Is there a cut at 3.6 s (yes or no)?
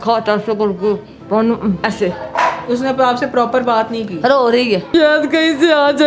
no